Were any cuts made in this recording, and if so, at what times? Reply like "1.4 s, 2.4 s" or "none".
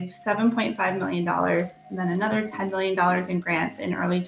none